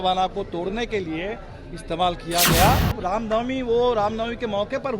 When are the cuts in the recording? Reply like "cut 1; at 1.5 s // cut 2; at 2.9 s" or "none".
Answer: cut 1; at 3.0 s